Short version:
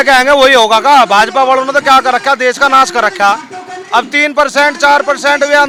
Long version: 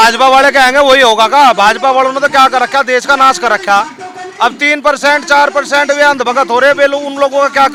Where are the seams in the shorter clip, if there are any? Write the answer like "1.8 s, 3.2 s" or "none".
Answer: none